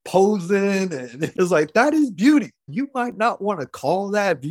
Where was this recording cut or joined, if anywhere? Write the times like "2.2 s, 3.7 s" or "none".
1.2 s, 2.7 s